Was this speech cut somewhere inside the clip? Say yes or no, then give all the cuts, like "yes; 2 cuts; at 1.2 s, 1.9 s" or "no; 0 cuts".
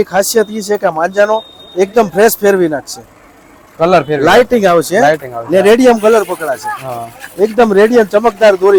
no; 0 cuts